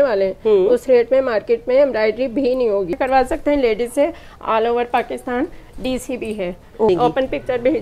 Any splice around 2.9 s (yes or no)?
yes